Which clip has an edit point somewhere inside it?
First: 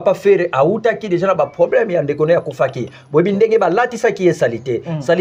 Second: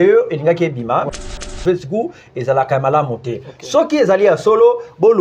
second; 1 cut; at 1.1 s

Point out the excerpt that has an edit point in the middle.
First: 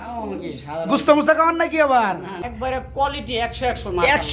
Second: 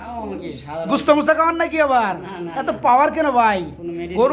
first; 1 cut; at 2.5 s

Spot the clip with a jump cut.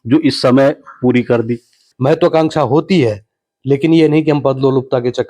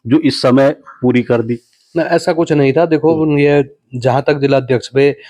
first; 1 cut; at 1.8 s

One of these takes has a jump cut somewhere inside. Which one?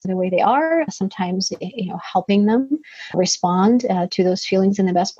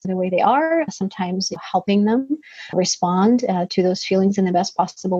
second; 1 cut; at 1.6 s

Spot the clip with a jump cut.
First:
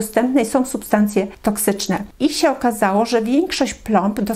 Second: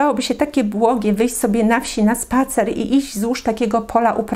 first; 1 cut; at 1.5 s

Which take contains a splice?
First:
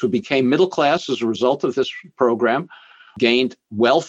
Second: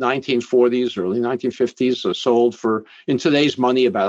first; 1 cut; at 3.1 s

